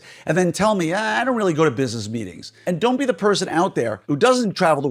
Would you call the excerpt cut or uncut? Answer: cut